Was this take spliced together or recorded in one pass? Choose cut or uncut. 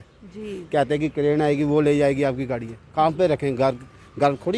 uncut